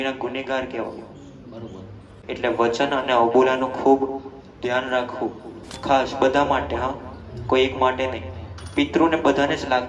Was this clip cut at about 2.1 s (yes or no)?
yes